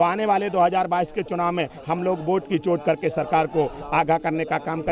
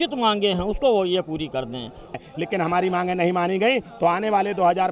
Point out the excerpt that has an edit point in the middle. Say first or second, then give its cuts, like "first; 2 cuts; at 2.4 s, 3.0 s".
second; 1 cut; at 2.1 s